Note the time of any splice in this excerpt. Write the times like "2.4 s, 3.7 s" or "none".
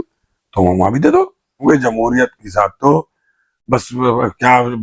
1.6 s